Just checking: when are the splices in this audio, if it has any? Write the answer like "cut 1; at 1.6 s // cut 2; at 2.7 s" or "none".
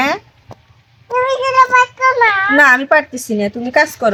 none